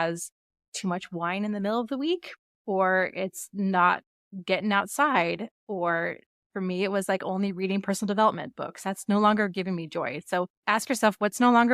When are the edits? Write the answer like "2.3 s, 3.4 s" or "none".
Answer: 10.6 s